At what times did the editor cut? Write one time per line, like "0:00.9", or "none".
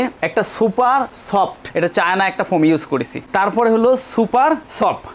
0:01.7